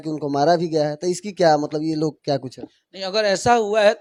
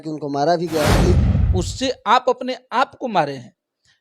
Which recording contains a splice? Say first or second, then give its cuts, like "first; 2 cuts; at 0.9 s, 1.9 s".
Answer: second; 1 cut; at 1.3 s